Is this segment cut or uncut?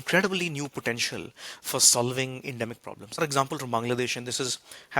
cut